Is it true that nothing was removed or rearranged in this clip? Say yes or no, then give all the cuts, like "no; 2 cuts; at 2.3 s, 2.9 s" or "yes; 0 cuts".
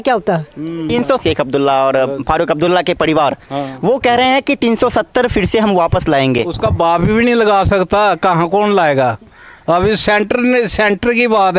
no; 1 cut; at 1.2 s